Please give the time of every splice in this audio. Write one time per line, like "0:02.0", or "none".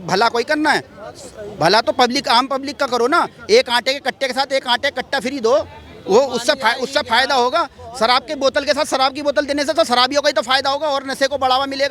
none